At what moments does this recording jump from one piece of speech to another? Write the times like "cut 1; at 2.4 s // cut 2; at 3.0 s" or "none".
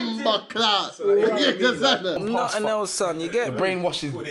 cut 1; at 2.2 s